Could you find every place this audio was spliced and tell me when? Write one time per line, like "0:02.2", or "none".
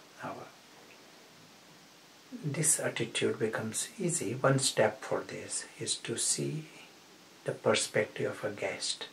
0:01.3